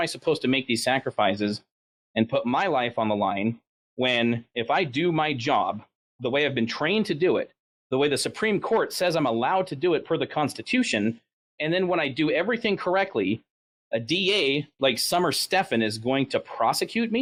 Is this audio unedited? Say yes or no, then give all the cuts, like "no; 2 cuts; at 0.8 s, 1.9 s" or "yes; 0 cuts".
yes; 0 cuts